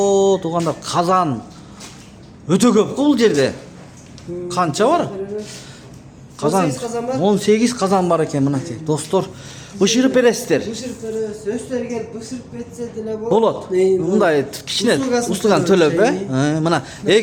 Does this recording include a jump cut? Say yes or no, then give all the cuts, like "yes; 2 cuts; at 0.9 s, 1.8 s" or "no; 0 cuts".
no; 0 cuts